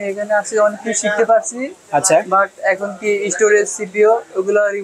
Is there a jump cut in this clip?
no; 0 cuts

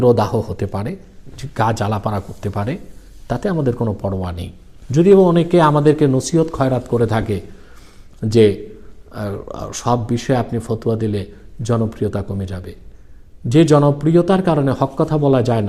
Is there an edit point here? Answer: no; 0 cuts

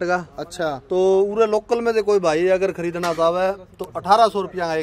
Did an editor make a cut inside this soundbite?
no; 0 cuts

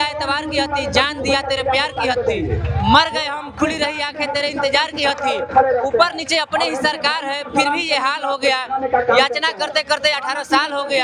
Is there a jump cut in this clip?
no; 0 cuts

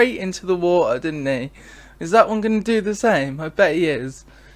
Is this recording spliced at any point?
no; 0 cuts

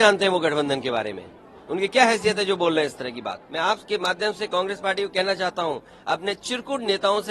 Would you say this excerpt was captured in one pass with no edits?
no; 1 cut; at 3.4 s

